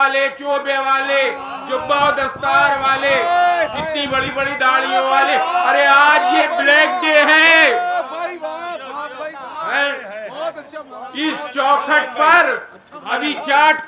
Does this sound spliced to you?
no; 0 cuts

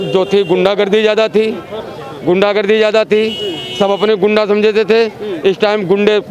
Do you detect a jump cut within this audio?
no; 0 cuts

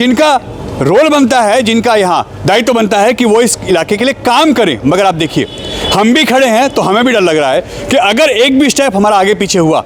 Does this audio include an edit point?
no; 0 cuts

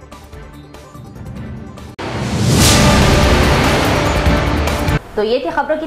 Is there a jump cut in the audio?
no; 0 cuts

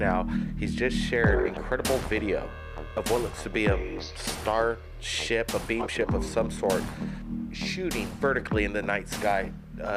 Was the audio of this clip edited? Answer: yes; 1 cut; at 4.0 s

